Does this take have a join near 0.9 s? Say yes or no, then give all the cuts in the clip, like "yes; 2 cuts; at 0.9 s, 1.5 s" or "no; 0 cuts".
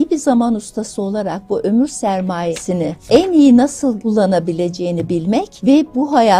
no; 3 cuts; at 2.6 s, 4.0 s, 5.5 s